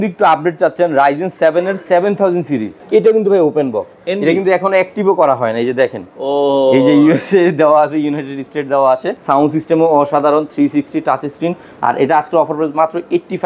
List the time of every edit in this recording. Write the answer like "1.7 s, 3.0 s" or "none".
2.8 s, 9.1 s